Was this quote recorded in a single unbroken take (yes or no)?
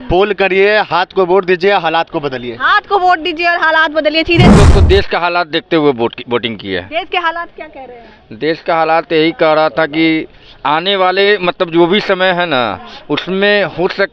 no